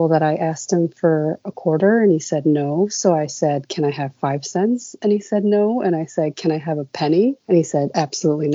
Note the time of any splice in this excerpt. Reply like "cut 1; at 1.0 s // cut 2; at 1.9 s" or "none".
cut 1; at 7.4 s